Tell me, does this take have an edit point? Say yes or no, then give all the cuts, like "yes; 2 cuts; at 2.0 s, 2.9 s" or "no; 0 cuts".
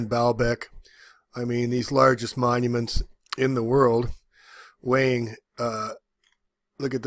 yes; 1 cut; at 2.9 s